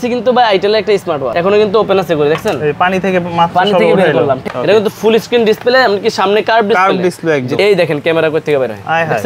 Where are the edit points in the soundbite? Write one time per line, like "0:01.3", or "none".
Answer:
0:01.3
0:04.4
0:07.5

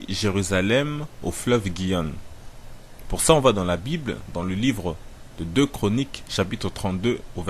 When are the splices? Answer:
none

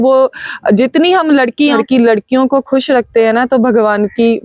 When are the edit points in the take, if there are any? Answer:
0:01.8

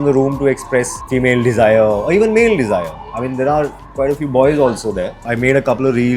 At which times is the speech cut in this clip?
0:01.0
0:05.2

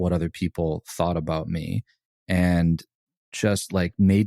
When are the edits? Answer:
0:03.2

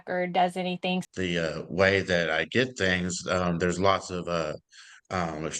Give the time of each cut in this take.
0:01.0

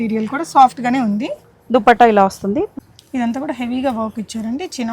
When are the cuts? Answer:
0:02.7

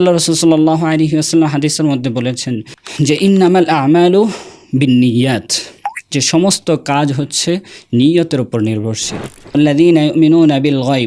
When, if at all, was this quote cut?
0:09.5

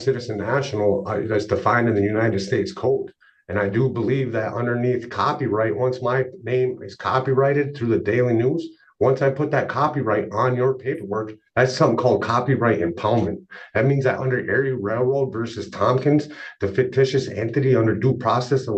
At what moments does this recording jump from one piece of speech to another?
none

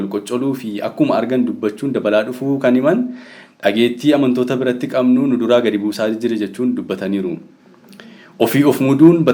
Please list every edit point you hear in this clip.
none

